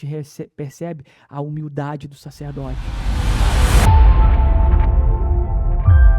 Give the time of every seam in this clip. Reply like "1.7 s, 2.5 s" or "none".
2.9 s